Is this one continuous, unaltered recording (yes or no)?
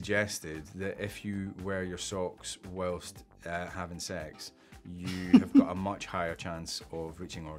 yes